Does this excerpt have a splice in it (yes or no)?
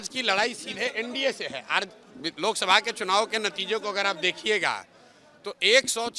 no